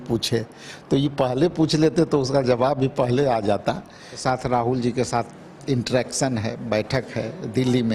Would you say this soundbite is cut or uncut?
cut